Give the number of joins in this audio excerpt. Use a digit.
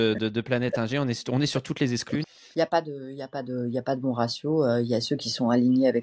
1